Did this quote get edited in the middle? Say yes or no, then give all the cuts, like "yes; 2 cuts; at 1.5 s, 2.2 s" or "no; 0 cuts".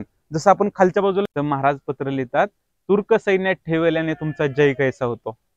yes; 1 cut; at 1.2 s